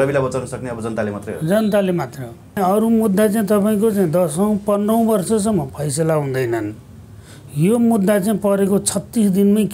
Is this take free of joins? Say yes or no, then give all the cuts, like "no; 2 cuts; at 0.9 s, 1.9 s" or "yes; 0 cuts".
no; 1 cut; at 2.6 s